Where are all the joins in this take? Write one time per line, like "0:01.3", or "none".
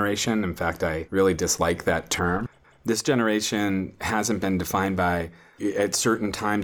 0:02.4
0:05.6